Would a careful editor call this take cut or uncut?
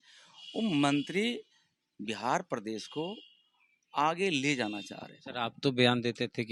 uncut